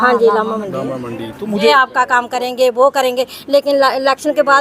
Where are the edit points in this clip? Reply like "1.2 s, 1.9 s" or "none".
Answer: 1.7 s